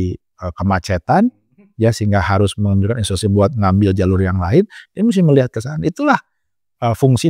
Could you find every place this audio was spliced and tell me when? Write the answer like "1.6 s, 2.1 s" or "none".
none